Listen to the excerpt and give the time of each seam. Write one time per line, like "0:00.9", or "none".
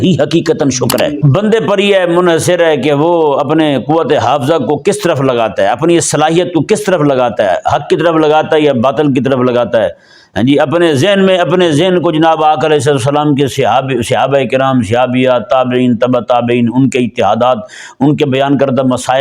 0:01.2